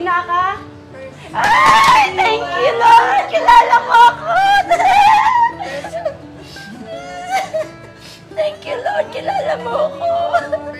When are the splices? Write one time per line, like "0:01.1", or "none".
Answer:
0:06.0